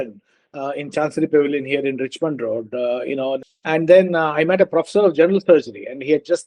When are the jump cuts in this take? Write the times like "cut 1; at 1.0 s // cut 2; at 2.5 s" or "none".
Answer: cut 1; at 3.5 s

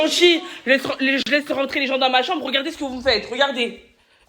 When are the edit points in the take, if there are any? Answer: cut 1; at 1.2 s

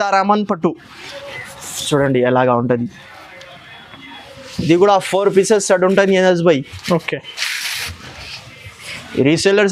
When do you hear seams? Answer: none

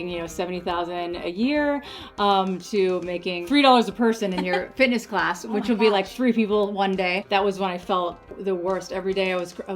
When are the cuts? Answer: cut 1; at 3.3 s // cut 2; at 7.2 s // cut 3; at 8.3 s

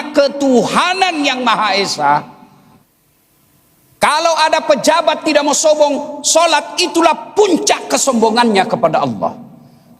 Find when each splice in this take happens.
cut 1; at 2.8 s

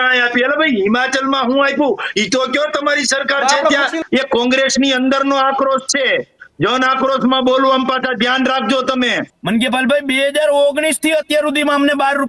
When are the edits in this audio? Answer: cut 1; at 4.0 s // cut 2; at 9.3 s

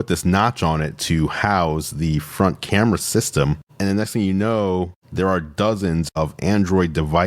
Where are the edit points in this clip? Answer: cut 1; at 3.7 s // cut 2; at 6.1 s

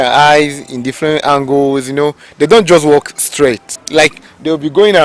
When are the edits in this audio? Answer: cut 1; at 3.7 s

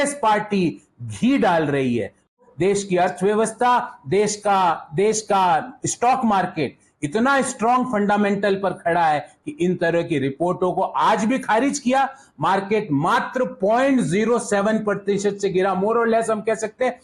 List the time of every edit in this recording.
cut 1; at 2.4 s

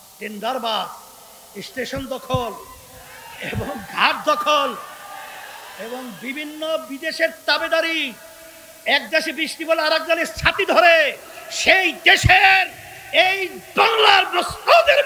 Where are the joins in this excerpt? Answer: none

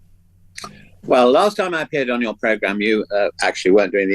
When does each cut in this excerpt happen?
cut 1; at 2.8 s

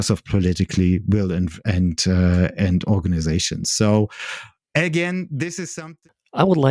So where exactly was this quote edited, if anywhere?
cut 1; at 5.6 s

